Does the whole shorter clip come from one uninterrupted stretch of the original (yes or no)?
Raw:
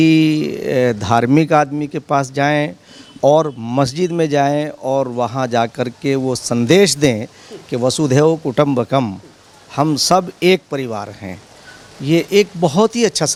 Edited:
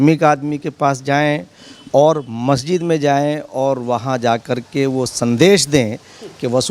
yes